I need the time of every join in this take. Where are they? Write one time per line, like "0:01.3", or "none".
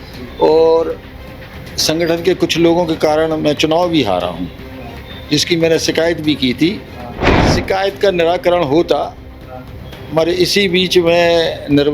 0:07.5